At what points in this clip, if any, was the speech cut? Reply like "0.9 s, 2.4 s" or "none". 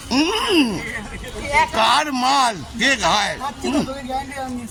none